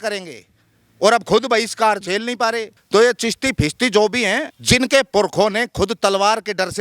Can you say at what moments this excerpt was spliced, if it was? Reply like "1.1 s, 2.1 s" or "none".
2.7 s, 4.5 s